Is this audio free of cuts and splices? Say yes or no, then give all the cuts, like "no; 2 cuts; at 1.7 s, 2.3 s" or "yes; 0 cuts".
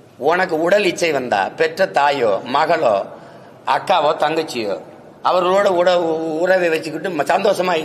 yes; 0 cuts